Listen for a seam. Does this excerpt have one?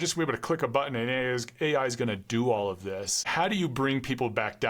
no; 0 cuts

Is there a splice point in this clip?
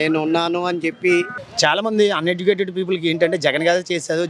yes; 1 cut; at 1.4 s

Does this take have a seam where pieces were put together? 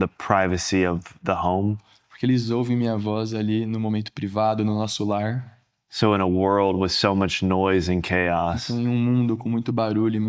no; 0 cuts

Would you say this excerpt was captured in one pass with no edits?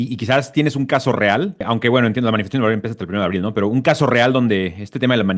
yes; 0 cuts

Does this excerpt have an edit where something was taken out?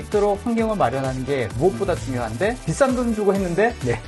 yes; 1 cut; at 2.6 s

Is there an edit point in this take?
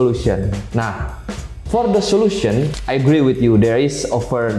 yes; 1 cut; at 2.7 s

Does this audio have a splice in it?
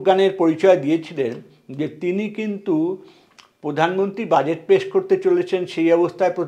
no; 0 cuts

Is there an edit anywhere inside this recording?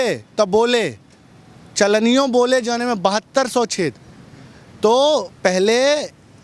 no; 0 cuts

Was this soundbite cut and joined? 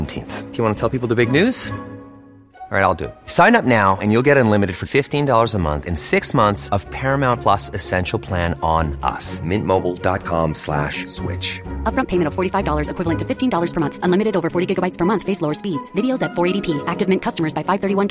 no; 0 cuts

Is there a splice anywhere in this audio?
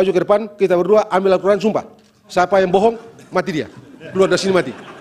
no; 0 cuts

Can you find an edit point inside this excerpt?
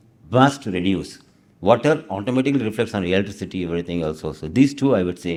no; 0 cuts

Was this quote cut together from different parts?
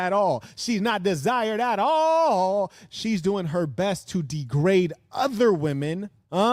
no; 0 cuts

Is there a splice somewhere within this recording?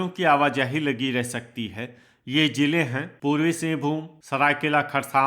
yes; 2 cuts; at 3.1 s, 4.1 s

